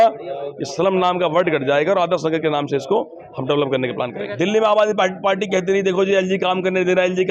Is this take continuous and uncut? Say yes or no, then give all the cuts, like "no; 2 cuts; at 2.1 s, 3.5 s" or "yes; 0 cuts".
no; 1 cut; at 4.2 s